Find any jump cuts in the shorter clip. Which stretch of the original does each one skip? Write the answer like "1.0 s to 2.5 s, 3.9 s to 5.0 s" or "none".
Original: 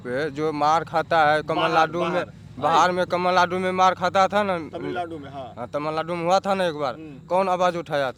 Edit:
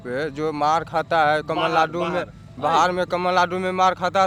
none